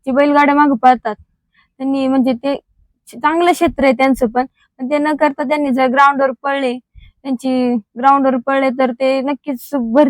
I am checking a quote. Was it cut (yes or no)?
no